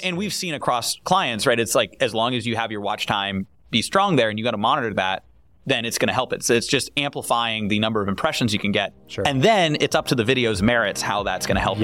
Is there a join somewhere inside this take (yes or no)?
no